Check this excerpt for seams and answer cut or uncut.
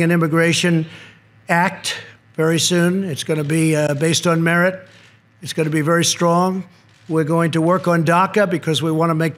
uncut